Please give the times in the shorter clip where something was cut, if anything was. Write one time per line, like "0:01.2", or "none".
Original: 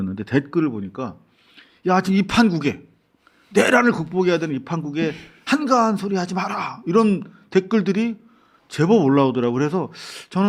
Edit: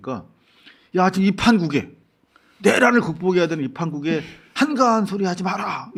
none